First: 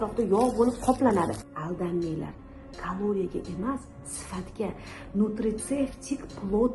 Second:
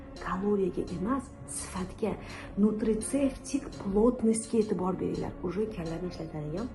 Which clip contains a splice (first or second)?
first